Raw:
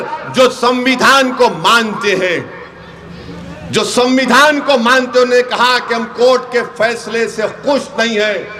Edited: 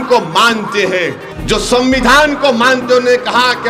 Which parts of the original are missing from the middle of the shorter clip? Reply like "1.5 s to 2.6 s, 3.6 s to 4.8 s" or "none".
2.6 s to 3.5 s